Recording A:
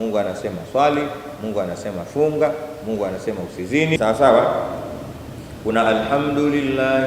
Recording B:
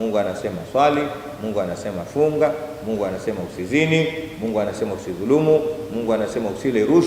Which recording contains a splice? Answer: A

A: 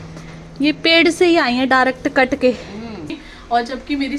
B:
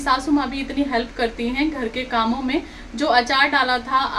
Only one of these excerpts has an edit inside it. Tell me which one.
A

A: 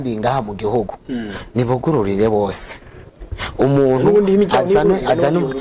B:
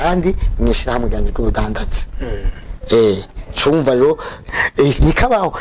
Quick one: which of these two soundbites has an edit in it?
B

